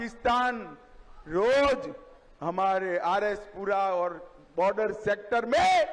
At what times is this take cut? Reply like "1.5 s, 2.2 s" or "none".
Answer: none